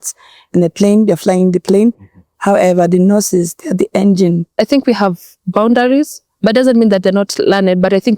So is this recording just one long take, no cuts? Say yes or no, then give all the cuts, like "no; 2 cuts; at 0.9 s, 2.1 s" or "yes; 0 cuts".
no; 1 cut; at 4.5 s